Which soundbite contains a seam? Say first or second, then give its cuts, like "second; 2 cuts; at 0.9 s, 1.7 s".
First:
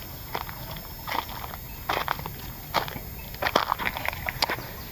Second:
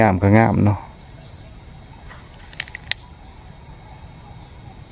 first; 1 cut; at 3.8 s